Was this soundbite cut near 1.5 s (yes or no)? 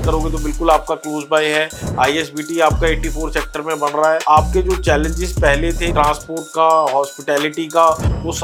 no